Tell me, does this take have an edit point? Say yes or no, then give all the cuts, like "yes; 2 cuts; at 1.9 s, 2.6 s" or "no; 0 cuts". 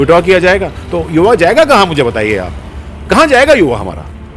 no; 0 cuts